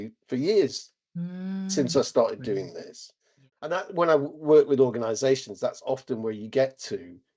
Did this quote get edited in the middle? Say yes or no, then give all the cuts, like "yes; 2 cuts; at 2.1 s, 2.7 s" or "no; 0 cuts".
yes; 1 cut; at 3.7 s